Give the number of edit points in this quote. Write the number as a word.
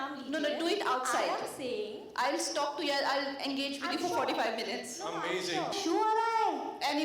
one